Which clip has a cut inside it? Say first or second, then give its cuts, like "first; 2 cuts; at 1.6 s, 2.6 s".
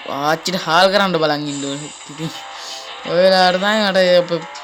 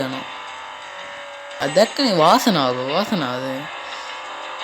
second; 1 cut; at 1.6 s